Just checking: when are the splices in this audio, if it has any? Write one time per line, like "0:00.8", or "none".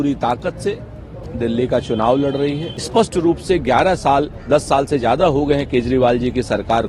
0:02.7